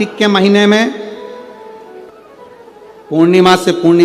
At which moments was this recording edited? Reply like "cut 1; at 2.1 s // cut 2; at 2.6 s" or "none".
cut 1; at 2.1 s